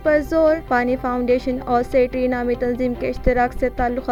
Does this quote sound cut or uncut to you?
uncut